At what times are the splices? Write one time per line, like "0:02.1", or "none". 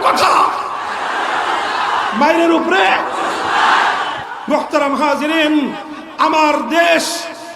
0:04.3